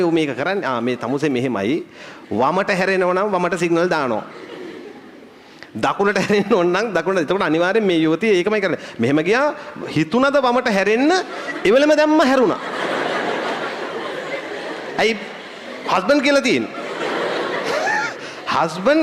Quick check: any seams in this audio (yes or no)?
no